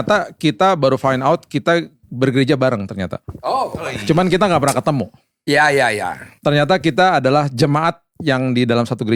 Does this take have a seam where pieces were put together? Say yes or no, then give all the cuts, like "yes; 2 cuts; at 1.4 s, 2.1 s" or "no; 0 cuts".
no; 0 cuts